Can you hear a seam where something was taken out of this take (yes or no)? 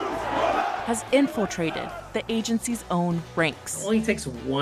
no